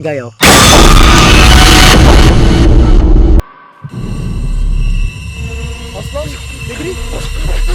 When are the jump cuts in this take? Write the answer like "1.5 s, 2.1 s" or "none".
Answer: 3.5 s